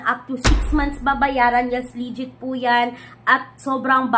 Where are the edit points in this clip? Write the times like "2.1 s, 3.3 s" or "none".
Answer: none